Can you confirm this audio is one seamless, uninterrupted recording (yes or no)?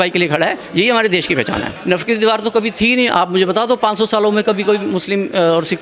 no